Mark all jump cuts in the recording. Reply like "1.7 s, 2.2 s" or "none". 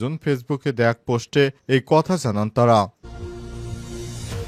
2.9 s